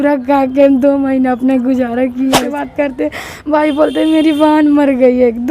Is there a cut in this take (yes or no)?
yes